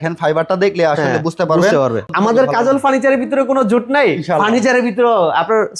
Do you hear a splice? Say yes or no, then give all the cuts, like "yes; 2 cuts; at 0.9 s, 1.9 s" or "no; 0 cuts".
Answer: yes; 1 cut; at 2.1 s